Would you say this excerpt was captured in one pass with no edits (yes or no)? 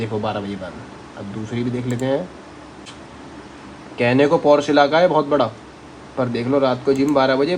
no